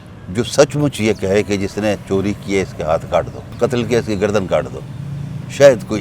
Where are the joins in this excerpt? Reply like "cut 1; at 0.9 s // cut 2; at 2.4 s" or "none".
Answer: cut 1; at 3.4 s